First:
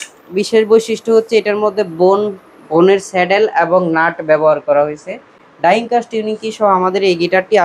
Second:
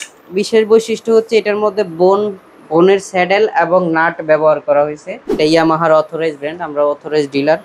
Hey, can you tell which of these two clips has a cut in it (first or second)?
second